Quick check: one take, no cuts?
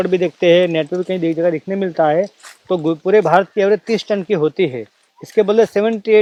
yes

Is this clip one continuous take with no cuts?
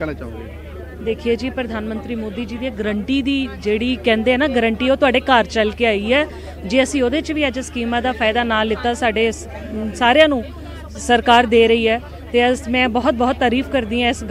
yes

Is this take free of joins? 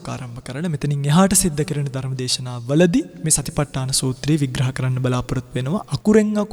yes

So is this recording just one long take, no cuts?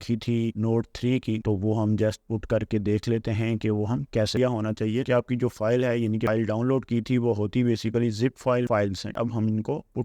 no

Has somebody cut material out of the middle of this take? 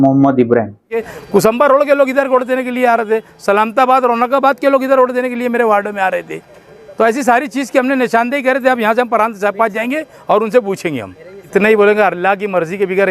yes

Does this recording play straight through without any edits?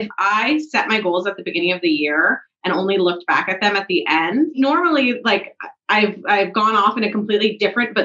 no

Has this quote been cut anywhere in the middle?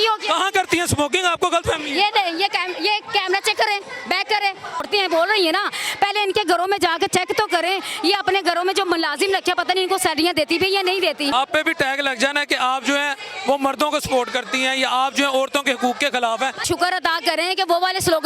yes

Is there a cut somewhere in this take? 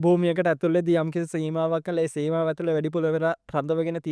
no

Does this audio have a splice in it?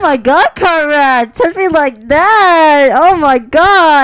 no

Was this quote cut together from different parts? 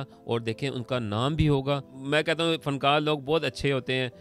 yes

